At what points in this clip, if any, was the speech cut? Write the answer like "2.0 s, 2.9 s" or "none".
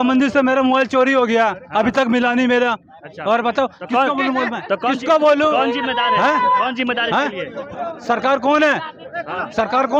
none